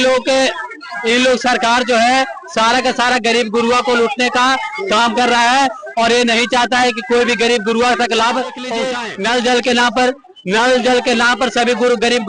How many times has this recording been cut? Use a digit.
1